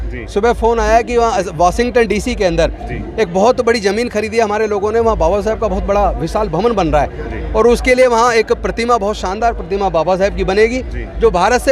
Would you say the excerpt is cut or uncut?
uncut